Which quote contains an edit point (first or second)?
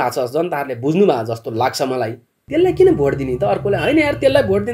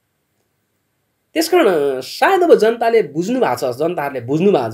first